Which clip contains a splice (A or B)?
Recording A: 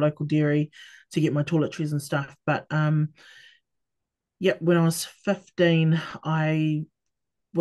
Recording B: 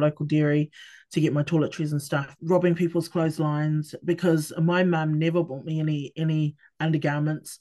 B